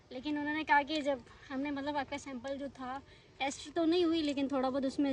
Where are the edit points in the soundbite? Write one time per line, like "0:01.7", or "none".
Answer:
none